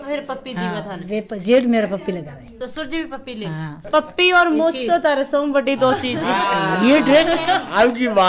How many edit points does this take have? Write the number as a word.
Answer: two